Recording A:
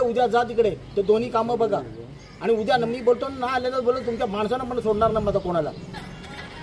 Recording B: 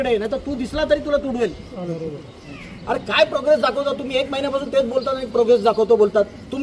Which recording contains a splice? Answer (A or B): B